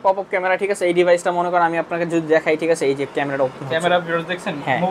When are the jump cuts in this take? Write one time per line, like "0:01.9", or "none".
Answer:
none